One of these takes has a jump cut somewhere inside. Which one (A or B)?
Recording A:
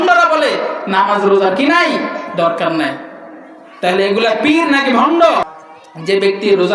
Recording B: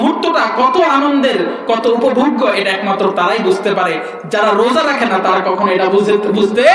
A